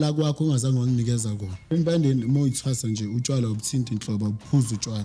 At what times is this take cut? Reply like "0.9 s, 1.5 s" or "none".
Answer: 1.7 s